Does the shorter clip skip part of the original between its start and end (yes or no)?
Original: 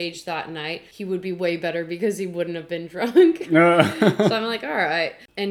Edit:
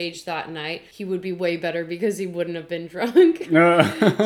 no